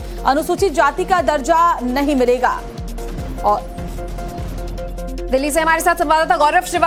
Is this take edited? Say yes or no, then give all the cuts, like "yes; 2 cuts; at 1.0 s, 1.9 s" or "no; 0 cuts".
no; 0 cuts